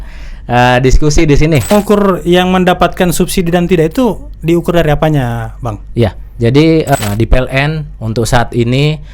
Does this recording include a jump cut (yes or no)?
yes